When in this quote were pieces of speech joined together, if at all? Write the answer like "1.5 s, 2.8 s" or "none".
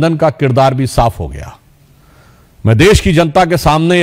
none